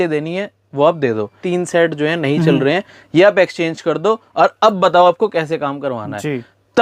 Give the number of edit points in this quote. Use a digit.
1